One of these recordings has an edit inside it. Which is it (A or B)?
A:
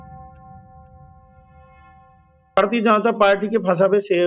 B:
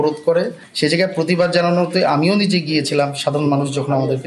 A